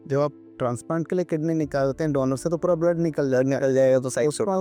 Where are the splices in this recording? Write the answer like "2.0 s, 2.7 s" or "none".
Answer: none